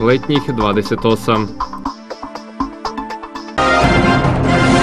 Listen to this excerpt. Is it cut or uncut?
cut